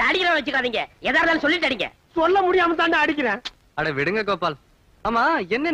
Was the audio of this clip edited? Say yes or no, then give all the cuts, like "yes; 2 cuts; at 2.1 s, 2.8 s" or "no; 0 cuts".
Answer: no; 0 cuts